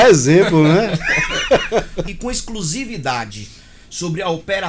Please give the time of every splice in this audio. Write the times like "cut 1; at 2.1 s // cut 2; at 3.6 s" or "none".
cut 1; at 2.1 s